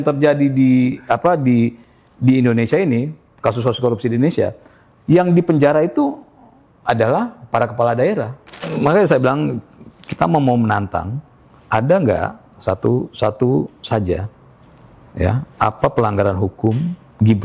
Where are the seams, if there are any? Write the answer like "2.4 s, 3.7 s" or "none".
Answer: 8.7 s